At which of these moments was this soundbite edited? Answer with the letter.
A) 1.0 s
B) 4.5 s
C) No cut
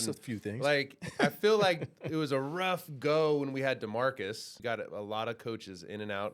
B